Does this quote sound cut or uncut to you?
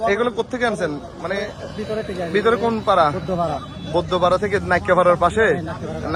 uncut